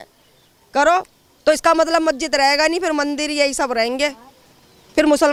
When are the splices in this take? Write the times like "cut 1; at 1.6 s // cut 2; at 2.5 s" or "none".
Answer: none